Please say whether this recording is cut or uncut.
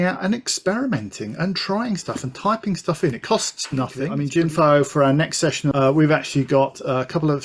cut